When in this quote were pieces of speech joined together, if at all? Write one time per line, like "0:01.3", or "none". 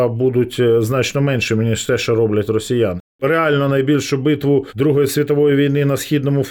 0:03.1
0:04.7

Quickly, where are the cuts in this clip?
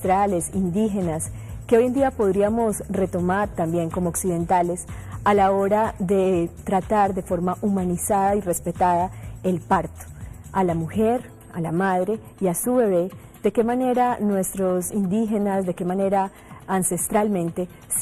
0:12.5

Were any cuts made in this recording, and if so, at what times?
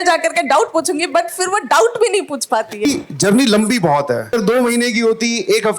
0:02.8
0:04.3

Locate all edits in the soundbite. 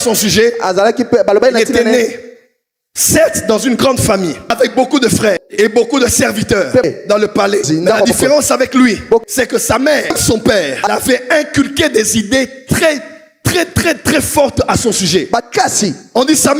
none

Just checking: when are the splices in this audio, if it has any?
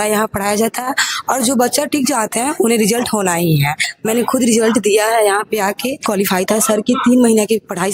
0:03.9
0:06.1

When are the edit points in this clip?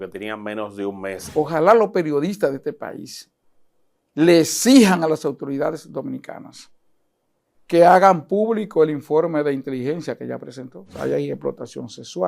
0:01.2
0:10.9

